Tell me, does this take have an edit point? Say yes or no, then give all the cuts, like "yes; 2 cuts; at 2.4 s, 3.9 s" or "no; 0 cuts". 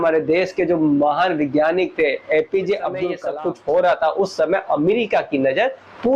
yes; 1 cut; at 3.2 s